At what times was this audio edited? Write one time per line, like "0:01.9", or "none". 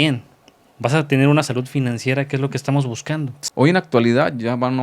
0:03.4